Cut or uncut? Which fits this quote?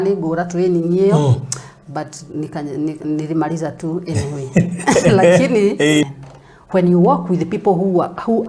cut